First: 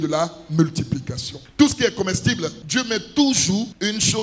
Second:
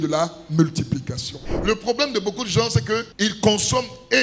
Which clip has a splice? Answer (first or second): second